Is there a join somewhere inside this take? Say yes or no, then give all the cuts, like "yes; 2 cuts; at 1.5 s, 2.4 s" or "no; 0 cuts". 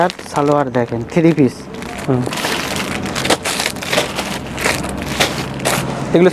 no; 0 cuts